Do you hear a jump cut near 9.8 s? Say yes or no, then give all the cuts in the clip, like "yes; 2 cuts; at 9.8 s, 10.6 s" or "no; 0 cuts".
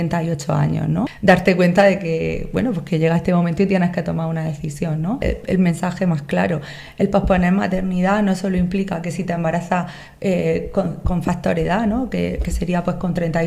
no; 2 cuts; at 1.1 s, 5.2 s